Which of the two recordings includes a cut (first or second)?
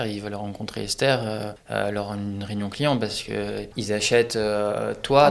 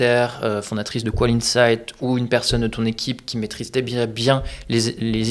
first